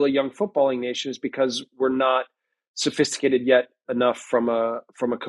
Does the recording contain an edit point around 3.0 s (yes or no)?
no